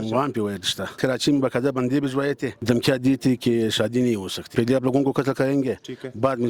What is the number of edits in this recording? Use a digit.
3